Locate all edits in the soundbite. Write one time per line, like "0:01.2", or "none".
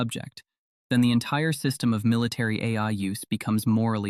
none